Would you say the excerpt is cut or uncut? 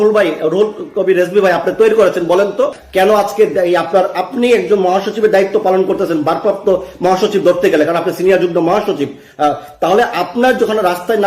cut